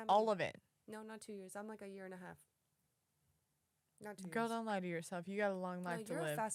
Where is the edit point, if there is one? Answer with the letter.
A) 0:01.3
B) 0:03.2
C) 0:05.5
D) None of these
D